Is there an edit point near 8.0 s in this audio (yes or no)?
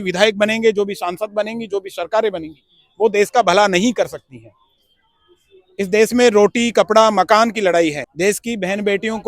yes